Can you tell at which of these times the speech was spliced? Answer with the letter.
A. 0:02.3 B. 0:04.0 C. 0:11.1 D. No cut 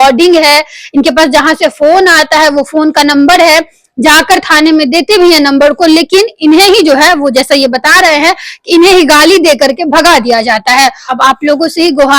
C